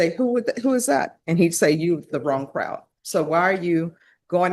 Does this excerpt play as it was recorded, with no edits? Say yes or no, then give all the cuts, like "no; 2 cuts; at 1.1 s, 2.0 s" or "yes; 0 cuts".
yes; 0 cuts